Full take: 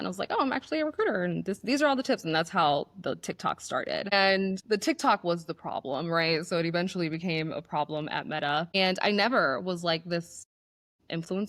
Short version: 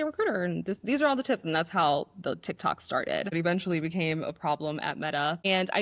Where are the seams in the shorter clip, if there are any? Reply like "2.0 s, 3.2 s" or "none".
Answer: 3.3 s